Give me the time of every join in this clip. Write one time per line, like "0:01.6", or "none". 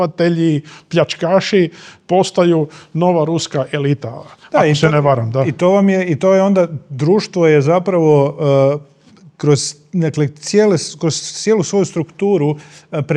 none